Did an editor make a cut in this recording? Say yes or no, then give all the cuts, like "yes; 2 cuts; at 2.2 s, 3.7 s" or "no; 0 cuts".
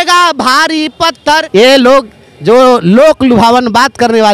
yes; 1 cut; at 1.4 s